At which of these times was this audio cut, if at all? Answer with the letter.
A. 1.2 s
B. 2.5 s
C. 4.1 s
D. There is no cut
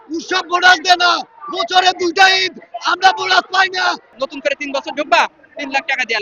C